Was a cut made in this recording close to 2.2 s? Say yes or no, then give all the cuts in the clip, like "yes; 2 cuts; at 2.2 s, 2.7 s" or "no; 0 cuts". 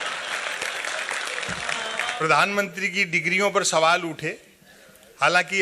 yes; 1 cut; at 2.2 s